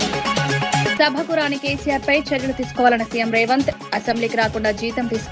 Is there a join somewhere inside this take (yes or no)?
yes